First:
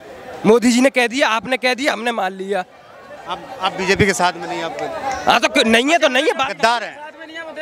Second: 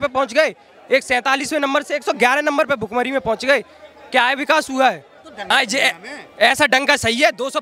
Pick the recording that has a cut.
second; 1 cut; at 5.5 s

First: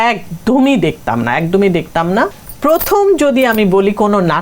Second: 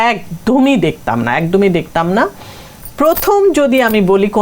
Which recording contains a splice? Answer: first; 1 cut; at 2.4 s

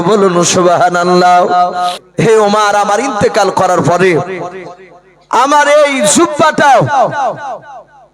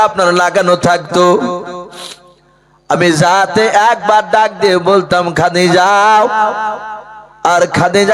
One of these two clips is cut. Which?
first; 1 cut; at 2.0 s

